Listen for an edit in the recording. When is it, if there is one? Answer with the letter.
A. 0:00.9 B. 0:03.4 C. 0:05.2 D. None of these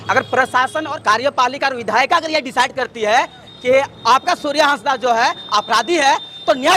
A